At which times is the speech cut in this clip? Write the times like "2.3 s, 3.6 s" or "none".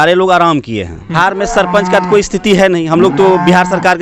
1.2 s